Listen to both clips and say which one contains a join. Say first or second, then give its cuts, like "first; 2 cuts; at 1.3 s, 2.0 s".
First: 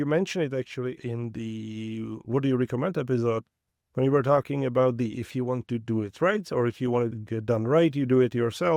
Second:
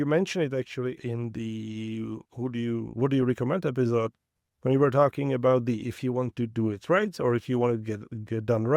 first; 2 cuts; at 2.2 s, 7.2 s